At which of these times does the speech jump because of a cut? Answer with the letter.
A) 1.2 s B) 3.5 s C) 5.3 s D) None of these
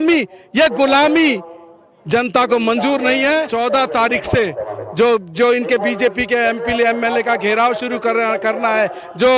B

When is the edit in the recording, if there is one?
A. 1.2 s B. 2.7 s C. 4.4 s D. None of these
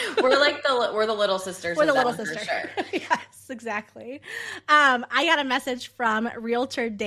D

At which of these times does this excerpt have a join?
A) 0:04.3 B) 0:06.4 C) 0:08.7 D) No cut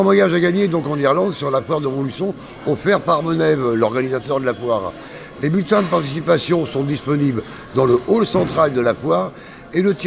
D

